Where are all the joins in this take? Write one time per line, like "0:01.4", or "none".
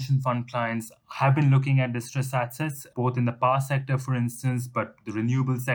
0:02.9